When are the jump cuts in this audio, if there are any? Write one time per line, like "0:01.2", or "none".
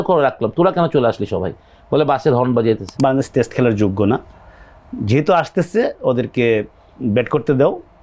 0:02.9